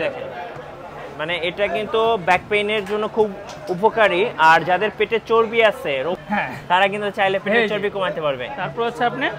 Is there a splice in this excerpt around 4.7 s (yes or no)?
no